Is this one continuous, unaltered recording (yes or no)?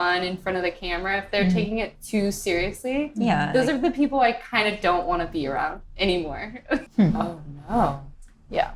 no